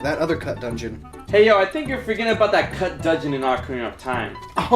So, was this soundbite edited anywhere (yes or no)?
yes